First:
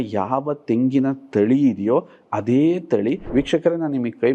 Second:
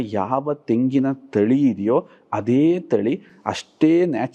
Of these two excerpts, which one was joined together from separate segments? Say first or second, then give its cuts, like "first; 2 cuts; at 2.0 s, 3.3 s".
first; 1 cut; at 3.2 s